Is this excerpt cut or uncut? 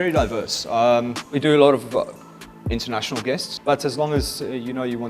cut